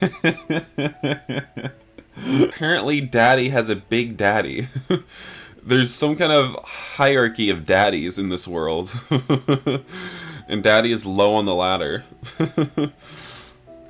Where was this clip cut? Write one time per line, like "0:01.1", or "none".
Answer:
0:02.6